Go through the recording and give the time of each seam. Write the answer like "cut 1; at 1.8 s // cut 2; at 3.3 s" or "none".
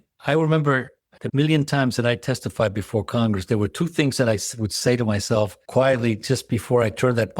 cut 1; at 1.2 s